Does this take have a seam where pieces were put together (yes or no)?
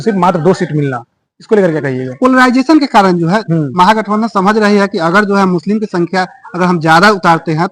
no